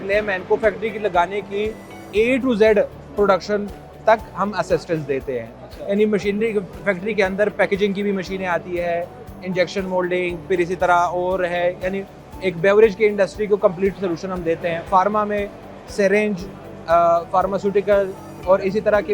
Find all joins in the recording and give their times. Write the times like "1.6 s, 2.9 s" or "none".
none